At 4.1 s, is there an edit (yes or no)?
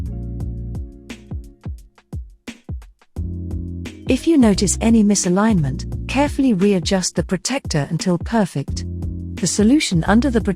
yes